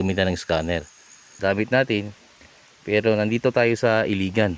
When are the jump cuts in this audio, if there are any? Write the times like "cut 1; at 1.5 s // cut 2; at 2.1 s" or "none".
cut 1; at 1.2 s